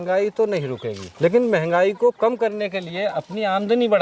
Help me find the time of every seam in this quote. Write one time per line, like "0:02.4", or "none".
none